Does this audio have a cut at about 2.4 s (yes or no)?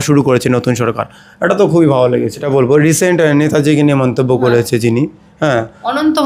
yes